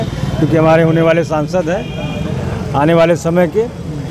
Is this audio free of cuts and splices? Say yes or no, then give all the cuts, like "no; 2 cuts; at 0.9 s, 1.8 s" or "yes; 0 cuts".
yes; 0 cuts